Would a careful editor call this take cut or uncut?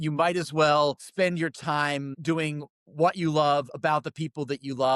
cut